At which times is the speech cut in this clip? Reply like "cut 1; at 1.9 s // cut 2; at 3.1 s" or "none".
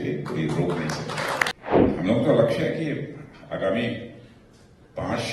cut 1; at 1.5 s